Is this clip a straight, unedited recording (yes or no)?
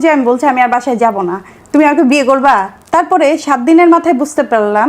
no